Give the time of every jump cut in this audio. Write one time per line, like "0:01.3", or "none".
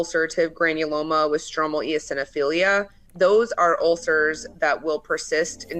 0:03.0